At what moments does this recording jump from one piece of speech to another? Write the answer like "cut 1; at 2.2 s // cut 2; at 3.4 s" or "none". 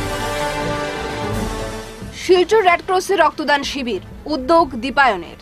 cut 1; at 1.2 s